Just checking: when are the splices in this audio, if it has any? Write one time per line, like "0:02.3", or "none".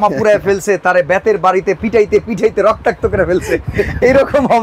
none